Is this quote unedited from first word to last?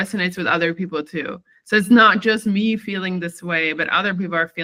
yes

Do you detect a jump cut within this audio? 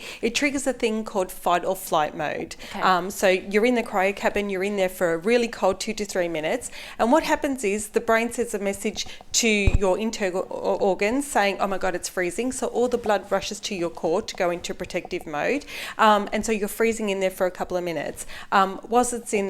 no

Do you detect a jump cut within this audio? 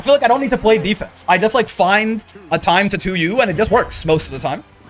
no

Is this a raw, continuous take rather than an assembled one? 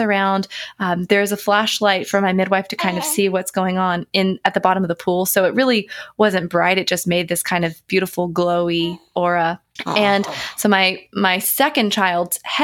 no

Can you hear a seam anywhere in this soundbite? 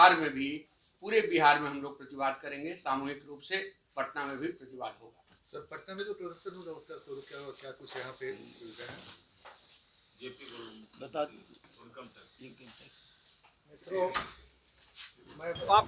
no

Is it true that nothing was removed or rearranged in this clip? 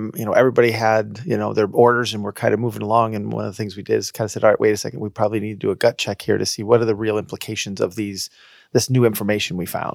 yes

